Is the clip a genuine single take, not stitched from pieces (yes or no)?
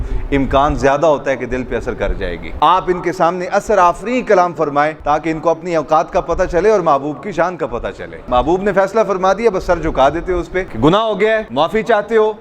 no